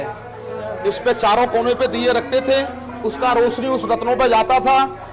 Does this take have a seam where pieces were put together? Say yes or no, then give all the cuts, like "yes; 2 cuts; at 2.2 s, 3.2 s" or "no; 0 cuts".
no; 0 cuts